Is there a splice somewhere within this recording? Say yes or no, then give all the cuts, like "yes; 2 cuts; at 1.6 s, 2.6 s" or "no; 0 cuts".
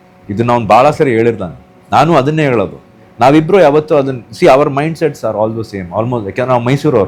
no; 0 cuts